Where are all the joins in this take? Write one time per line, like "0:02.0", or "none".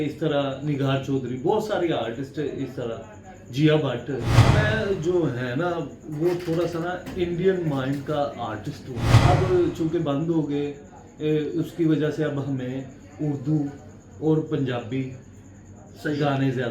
0:04.4
0:09.1